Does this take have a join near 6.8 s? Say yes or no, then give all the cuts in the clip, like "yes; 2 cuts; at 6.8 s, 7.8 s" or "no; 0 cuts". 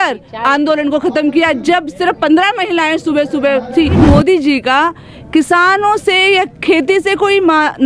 no; 1 cut; at 4.0 s